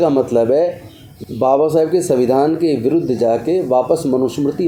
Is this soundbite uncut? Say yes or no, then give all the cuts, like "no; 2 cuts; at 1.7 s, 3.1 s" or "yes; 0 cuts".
yes; 0 cuts